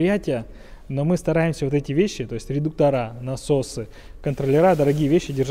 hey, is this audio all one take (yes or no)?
yes